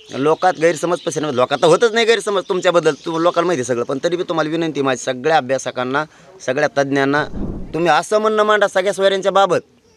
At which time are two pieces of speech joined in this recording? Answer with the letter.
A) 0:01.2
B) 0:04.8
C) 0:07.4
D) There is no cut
C